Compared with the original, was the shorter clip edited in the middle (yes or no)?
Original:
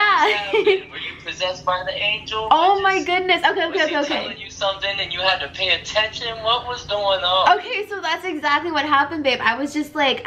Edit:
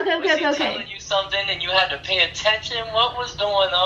no